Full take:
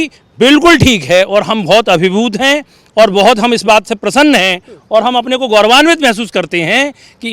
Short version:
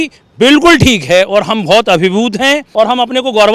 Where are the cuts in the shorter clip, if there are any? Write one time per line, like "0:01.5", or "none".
0:02.7